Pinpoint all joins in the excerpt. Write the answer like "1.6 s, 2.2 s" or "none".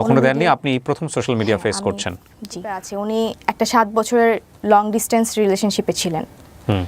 2.9 s